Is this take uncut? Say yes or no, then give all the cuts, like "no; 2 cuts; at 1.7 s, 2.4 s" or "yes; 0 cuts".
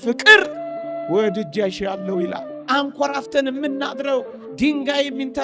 no; 1 cut; at 2.5 s